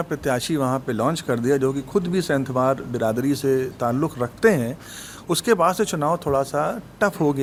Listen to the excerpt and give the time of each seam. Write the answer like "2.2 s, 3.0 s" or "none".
none

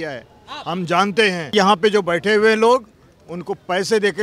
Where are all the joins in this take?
1.5 s

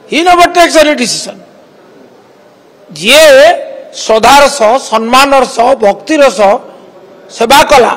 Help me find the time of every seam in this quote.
none

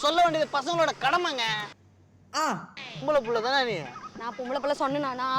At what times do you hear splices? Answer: 2.7 s

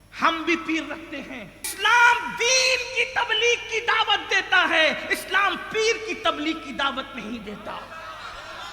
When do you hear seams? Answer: 1.6 s

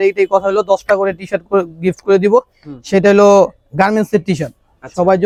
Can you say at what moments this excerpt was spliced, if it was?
none

